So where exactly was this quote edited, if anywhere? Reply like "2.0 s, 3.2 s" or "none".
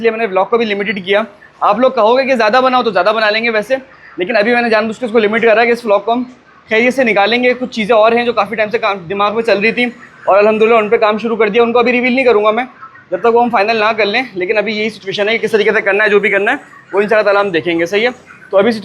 none